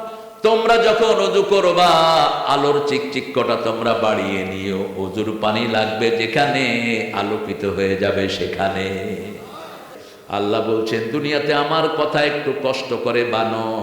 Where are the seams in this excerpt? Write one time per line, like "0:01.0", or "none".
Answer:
0:09.9